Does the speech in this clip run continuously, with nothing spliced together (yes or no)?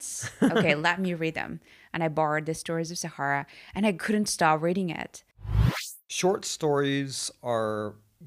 no